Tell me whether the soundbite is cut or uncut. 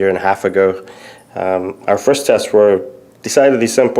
cut